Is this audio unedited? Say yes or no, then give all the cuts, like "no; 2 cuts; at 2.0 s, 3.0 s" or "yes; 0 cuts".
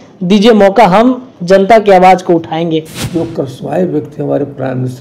no; 1 cut; at 3.0 s